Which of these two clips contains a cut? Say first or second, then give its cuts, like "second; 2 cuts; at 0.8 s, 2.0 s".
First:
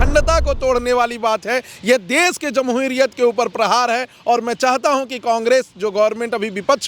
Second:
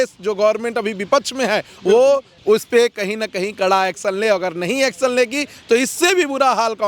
second; 1 cut; at 2.3 s